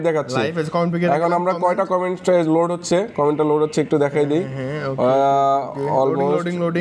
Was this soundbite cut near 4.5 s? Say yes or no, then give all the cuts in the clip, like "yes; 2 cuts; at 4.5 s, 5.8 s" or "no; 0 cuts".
no; 0 cuts